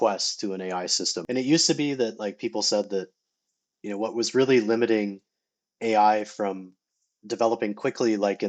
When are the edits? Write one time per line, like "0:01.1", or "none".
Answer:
0:01.0